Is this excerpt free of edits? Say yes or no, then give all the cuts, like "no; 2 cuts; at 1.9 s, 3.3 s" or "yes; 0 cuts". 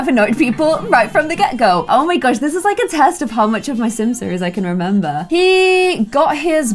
no; 2 cuts; at 1.8 s, 5.2 s